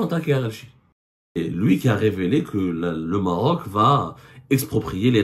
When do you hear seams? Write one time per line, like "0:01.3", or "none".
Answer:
0:01.4